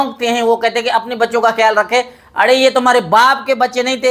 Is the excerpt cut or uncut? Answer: uncut